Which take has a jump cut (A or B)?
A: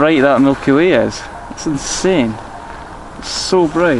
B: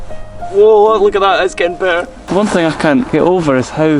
B